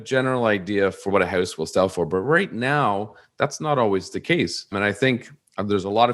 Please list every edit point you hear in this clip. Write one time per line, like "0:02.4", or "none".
0:01.0
0:04.7